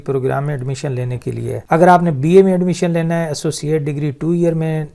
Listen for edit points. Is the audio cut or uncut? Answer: cut